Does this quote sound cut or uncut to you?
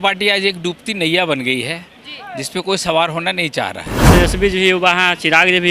cut